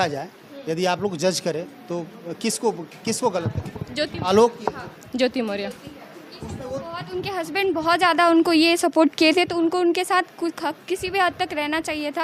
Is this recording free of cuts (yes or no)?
yes